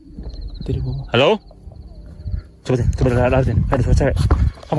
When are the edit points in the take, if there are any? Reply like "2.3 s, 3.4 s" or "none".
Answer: none